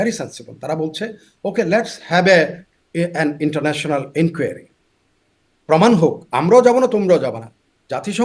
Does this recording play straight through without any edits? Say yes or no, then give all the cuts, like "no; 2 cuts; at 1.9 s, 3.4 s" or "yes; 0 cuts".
yes; 0 cuts